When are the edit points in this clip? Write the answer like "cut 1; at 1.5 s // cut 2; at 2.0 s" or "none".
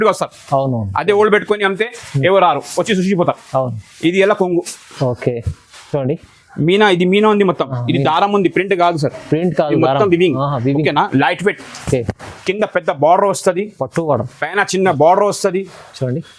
none